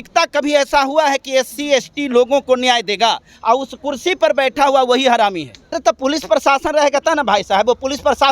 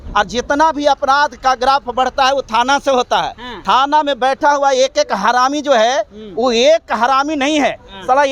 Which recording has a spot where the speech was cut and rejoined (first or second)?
first